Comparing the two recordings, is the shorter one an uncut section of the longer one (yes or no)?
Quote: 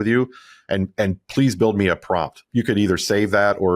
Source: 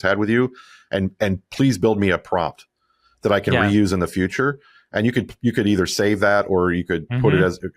no